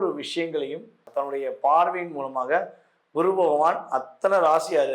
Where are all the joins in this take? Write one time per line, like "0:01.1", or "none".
0:01.1